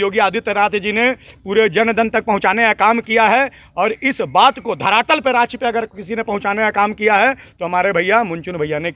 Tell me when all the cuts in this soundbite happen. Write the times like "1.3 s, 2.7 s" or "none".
none